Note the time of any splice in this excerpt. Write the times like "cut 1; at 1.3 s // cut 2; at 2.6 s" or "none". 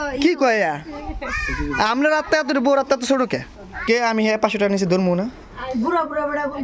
cut 1; at 3.8 s